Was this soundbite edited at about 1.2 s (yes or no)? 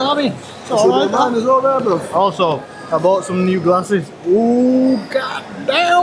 no